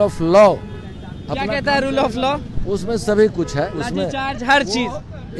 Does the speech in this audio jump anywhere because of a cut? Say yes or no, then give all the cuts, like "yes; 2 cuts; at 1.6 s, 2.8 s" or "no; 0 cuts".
no; 0 cuts